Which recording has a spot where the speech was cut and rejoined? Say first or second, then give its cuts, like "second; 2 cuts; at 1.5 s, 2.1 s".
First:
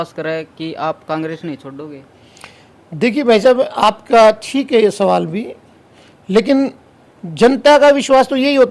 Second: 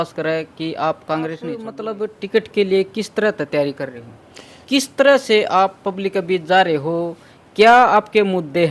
second; 2 cuts; at 1.7 s, 4.6 s